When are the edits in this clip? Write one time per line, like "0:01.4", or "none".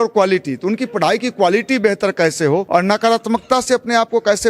0:02.7